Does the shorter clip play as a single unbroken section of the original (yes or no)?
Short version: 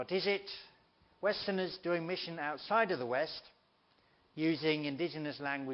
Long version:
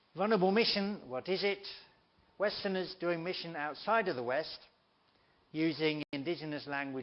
no